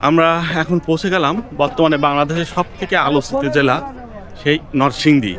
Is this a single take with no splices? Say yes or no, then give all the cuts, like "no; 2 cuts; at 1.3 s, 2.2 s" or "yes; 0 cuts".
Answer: yes; 0 cuts